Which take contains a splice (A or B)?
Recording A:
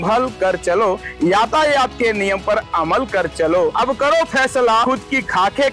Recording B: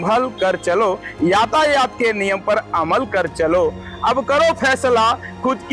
A